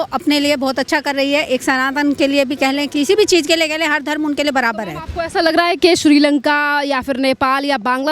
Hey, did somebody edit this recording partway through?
no; 0 cuts

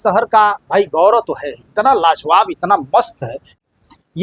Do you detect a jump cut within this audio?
no; 0 cuts

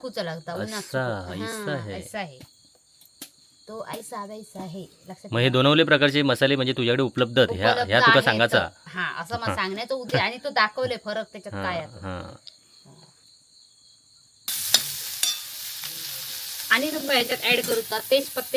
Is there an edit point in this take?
yes; 1 cut; at 14.6 s

